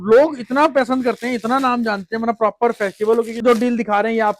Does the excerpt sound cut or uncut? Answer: cut